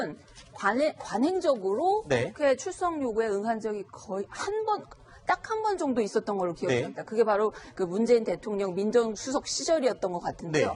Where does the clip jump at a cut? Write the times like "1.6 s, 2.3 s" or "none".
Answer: 1.6 s